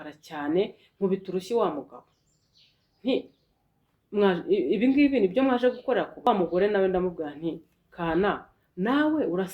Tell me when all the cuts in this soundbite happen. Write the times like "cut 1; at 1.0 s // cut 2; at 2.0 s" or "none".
cut 1; at 6.3 s